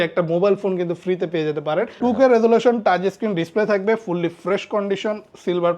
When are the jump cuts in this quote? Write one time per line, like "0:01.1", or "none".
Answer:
0:01.9